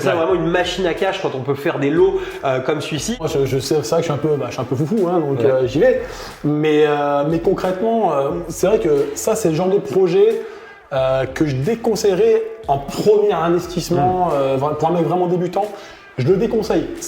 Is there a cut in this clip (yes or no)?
yes